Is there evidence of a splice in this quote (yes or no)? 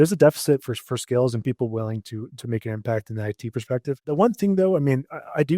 yes